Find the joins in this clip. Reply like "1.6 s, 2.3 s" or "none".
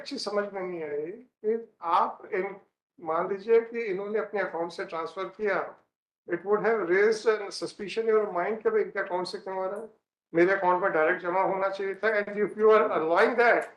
none